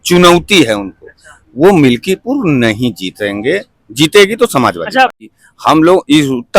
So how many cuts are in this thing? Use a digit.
1